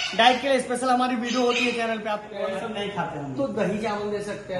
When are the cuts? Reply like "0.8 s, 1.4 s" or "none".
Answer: 2.4 s